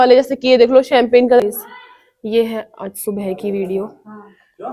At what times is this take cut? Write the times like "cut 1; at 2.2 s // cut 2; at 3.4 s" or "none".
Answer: cut 1; at 1.4 s